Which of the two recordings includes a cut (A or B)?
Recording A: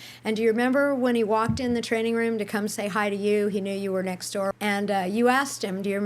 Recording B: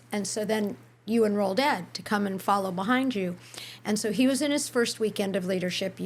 A